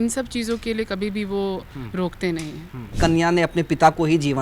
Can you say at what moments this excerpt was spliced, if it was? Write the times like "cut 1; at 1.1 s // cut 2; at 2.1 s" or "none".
cut 1; at 2.9 s